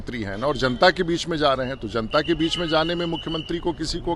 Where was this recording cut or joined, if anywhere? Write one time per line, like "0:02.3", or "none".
none